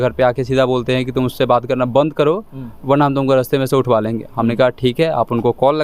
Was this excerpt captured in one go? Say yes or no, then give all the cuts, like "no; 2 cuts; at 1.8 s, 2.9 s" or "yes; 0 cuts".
yes; 0 cuts